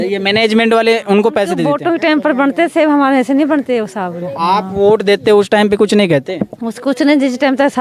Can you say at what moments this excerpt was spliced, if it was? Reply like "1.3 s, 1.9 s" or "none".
1.6 s